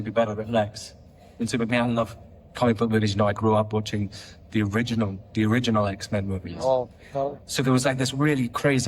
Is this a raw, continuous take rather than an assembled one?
no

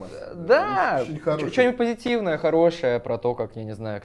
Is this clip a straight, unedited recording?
yes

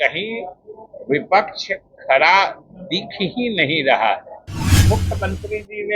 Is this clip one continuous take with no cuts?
no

